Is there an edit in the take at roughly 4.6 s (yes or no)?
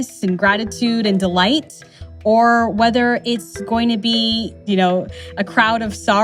yes